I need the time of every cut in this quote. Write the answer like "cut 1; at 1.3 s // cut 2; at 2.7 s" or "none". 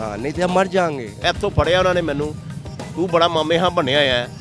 cut 1; at 1.1 s